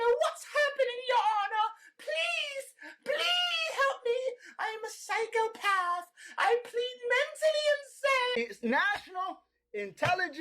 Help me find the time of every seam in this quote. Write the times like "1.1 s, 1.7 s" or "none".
8.3 s